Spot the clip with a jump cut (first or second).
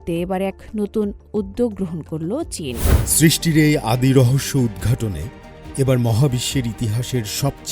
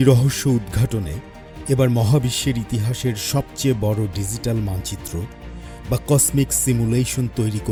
first